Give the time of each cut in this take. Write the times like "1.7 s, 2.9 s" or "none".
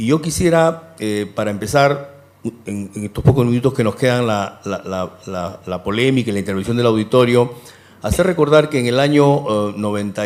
none